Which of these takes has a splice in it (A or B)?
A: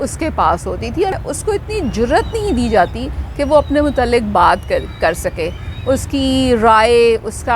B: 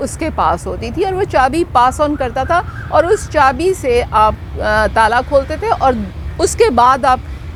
A